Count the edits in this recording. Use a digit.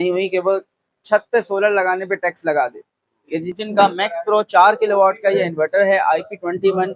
1